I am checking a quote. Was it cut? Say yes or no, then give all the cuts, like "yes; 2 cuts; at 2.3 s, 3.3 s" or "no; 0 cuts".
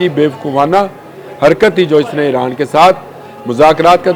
no; 0 cuts